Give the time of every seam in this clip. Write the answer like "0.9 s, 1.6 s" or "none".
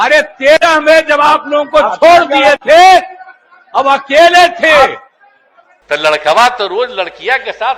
5.9 s